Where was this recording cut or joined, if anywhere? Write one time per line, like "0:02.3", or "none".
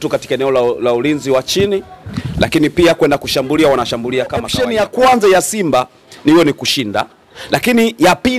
0:04.6

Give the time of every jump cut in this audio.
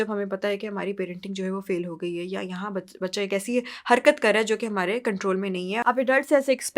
0:05.8

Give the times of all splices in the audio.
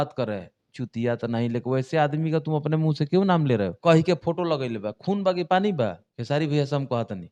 0:03.8
0:06.1

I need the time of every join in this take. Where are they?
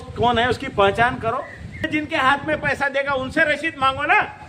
0:01.8

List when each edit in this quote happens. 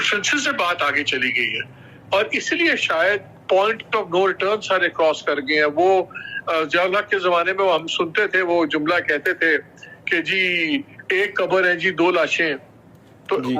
none

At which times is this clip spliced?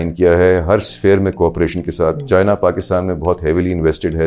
none

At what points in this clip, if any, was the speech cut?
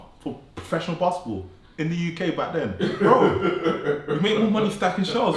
none

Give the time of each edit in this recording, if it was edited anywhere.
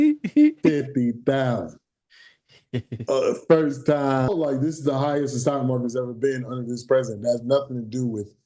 0:04.3

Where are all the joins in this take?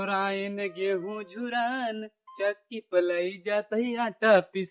none

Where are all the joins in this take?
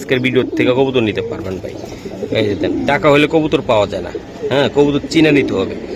none

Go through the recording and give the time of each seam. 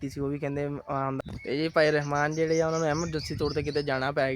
0:01.5

